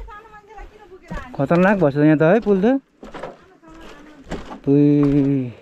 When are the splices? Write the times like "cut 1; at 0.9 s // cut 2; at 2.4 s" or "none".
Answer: none